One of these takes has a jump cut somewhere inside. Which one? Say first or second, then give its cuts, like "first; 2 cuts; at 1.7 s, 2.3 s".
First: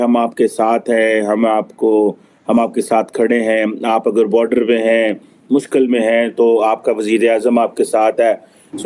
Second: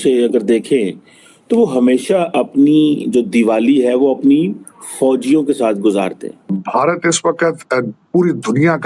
second; 1 cut; at 6.7 s